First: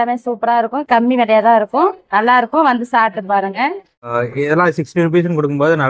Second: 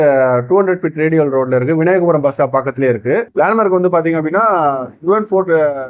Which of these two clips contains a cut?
first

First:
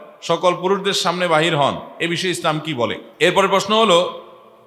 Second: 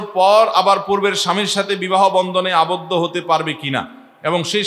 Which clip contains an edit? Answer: first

